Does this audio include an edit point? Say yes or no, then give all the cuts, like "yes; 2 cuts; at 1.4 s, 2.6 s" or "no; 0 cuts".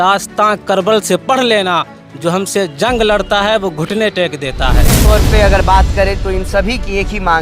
yes; 1 cut; at 5.0 s